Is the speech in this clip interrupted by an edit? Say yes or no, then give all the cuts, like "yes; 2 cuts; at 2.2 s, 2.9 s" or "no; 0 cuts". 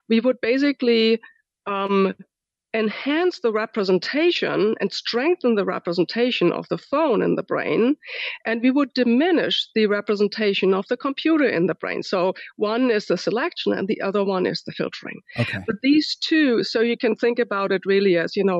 no; 0 cuts